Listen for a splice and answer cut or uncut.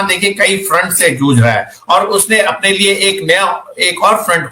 uncut